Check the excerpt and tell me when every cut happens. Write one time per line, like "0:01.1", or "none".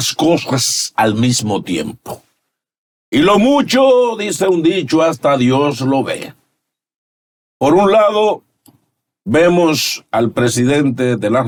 none